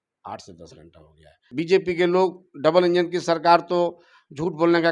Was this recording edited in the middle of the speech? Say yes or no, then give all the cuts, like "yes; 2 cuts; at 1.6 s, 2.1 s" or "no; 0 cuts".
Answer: yes; 1 cut; at 1.4 s